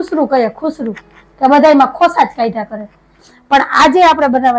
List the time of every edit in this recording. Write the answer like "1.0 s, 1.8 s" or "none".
3.2 s